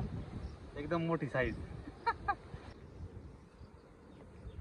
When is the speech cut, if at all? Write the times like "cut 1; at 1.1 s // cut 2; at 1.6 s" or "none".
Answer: cut 1; at 2.7 s